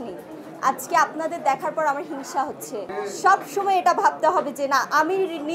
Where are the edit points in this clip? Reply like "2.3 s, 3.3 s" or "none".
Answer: 2.9 s